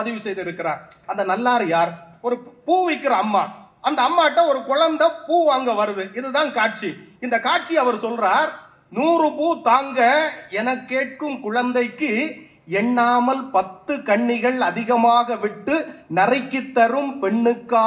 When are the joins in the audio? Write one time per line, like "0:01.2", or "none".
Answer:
0:01.0
0:02.1